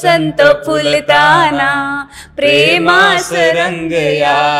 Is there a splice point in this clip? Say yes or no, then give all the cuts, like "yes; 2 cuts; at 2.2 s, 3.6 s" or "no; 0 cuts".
no; 0 cuts